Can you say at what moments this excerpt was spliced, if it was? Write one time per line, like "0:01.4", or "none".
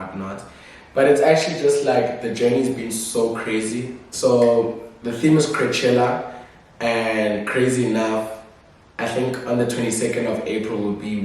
0:04.1